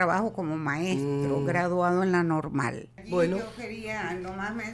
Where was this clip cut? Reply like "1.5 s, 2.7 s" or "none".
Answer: 3.0 s